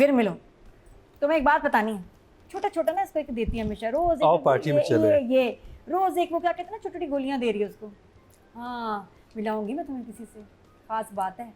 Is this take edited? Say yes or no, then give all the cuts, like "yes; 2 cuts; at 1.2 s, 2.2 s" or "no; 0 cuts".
no; 0 cuts